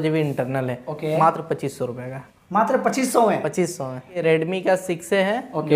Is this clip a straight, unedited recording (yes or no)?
no